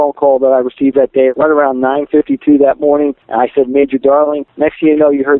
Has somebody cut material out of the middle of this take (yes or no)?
yes